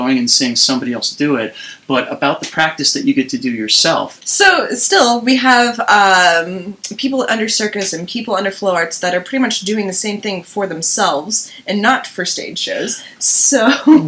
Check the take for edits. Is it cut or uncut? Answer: uncut